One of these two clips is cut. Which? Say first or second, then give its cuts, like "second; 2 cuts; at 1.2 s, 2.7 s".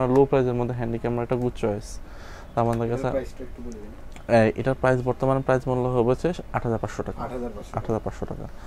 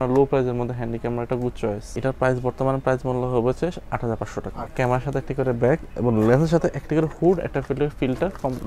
second; 2 cuts; at 2.0 s, 4.7 s